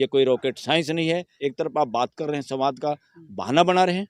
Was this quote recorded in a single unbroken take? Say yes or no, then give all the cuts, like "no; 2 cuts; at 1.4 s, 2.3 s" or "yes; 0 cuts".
no; 1 cut; at 1.3 s